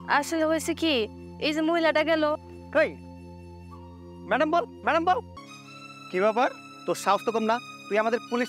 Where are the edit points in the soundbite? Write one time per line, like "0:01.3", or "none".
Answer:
0:05.4